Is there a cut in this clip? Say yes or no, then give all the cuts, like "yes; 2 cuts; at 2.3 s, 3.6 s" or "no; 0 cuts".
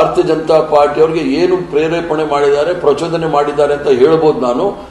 no; 0 cuts